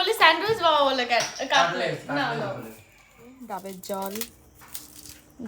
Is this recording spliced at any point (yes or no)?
yes